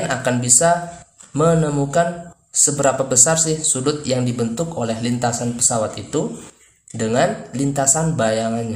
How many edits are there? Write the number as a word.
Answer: zero